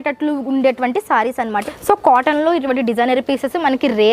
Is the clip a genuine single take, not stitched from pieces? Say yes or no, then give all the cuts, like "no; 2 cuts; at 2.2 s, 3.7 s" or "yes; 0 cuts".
no; 1 cut; at 1.7 s